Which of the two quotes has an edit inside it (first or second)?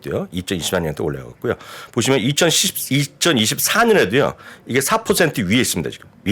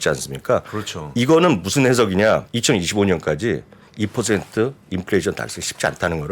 second